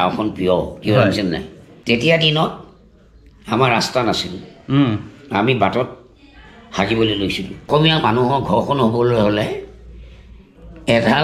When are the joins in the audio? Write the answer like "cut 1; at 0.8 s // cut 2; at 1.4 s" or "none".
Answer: cut 1; at 1.7 s // cut 2; at 7.7 s